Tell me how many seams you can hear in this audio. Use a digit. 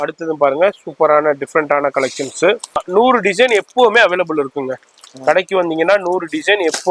1